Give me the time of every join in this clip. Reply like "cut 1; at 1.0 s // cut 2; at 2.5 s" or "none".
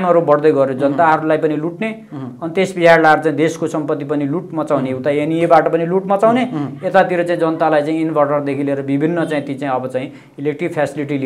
none